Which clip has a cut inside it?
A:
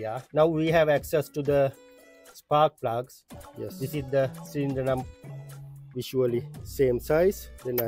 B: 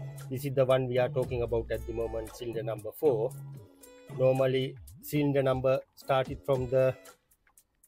A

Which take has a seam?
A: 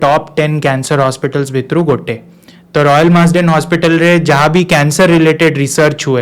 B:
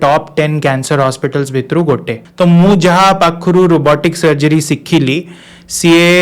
B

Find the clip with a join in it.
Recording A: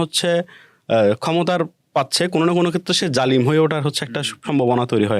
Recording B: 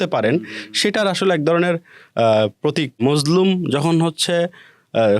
B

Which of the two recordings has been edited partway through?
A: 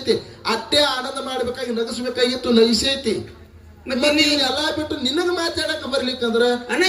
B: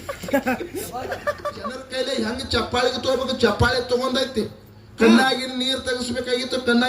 B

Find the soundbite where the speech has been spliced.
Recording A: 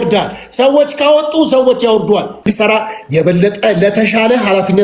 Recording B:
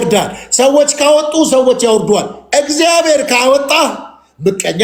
A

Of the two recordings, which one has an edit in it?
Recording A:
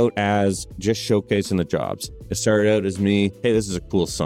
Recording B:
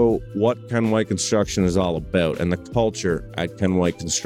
A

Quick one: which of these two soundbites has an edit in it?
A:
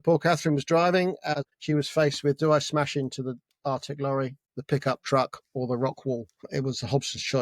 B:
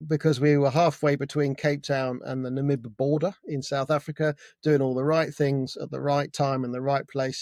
A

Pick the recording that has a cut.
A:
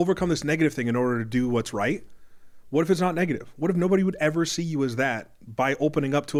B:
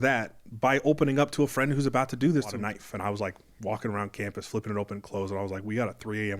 B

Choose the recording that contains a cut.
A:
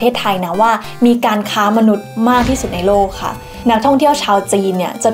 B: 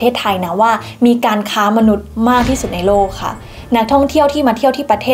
A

